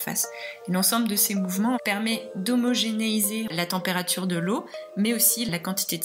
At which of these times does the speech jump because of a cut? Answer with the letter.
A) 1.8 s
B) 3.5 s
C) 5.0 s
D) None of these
D